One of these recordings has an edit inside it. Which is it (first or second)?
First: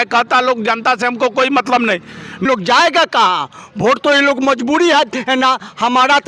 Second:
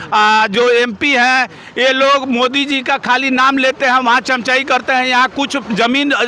first